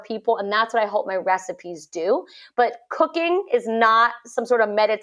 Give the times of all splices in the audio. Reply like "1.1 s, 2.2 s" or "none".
none